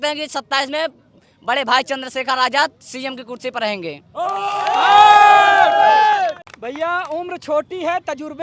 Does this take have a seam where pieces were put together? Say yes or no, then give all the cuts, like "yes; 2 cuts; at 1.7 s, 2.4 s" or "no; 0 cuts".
no; 0 cuts